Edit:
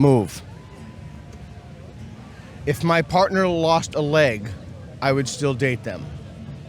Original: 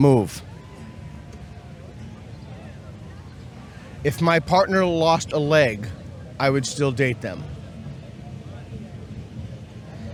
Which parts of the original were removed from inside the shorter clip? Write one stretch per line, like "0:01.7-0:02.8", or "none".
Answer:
0:02.2-0:03.6